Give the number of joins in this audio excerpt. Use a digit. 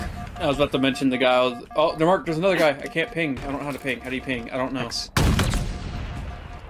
0